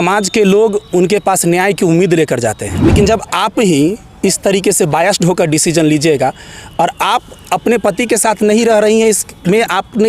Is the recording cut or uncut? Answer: cut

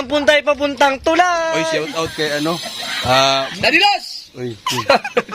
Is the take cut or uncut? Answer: cut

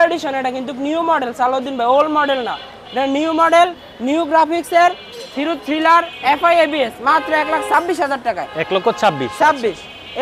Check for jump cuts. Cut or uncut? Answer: uncut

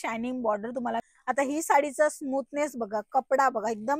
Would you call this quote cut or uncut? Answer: cut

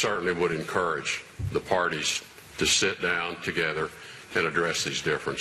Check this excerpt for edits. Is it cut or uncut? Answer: uncut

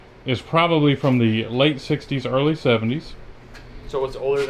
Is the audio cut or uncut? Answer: uncut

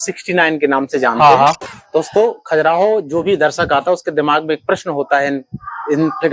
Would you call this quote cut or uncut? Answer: cut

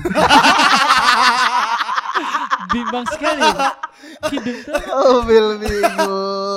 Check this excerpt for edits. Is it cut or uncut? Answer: uncut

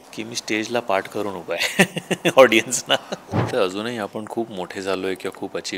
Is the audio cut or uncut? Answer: cut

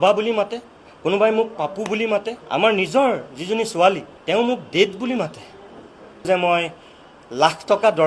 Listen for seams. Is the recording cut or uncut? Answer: cut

